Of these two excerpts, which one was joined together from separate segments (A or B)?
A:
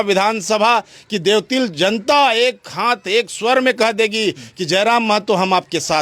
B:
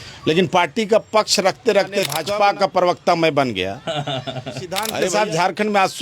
B